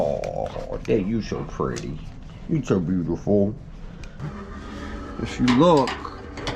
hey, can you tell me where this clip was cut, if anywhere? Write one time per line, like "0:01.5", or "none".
0:04.3